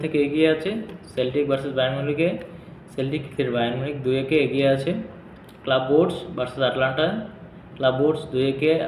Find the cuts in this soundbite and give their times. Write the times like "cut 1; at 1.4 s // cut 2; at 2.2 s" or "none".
none